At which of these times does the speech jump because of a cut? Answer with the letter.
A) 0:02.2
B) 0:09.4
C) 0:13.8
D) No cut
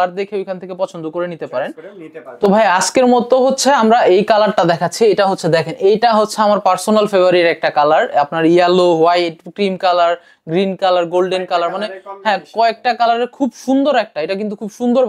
A